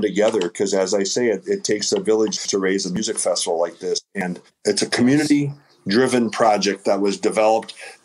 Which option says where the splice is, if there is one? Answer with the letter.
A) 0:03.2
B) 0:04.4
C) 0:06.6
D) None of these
B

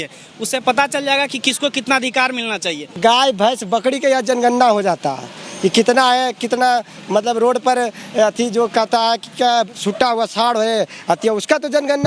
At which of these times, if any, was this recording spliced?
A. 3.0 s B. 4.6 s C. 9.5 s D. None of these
A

